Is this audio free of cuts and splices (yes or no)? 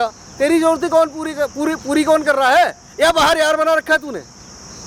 yes